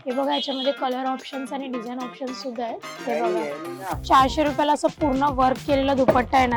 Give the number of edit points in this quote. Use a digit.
1